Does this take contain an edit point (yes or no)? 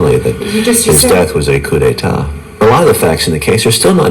yes